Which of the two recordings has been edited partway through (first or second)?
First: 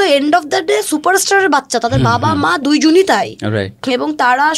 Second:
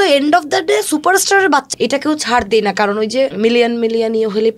second